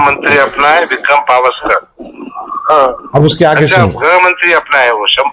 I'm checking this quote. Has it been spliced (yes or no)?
no